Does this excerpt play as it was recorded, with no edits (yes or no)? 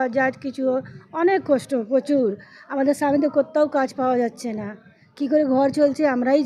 yes